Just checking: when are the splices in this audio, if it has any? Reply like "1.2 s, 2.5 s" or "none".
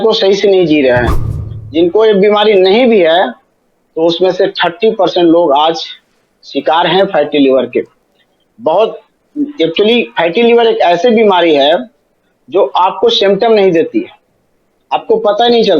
1.1 s